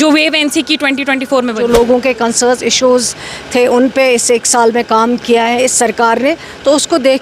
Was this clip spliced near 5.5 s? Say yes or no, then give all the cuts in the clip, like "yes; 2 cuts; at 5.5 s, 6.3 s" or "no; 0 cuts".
no; 1 cut; at 1.6 s